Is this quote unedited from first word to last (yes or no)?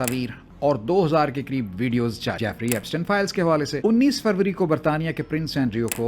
no